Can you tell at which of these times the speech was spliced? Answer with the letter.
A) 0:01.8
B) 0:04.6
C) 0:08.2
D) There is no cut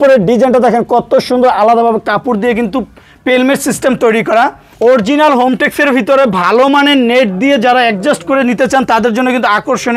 B